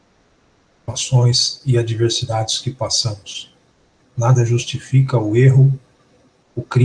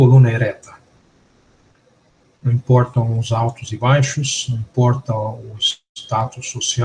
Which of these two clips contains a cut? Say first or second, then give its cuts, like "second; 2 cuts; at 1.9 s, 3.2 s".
first; 1 cut; at 2.6 s